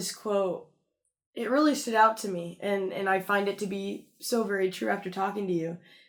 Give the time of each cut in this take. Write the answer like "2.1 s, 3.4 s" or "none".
none